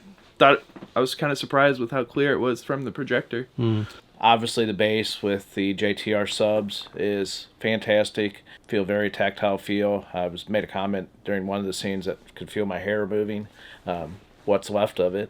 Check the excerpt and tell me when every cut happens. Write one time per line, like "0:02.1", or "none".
0:04.0
0:08.5